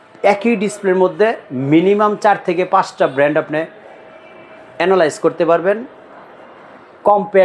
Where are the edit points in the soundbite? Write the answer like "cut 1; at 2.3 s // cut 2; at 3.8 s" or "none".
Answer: none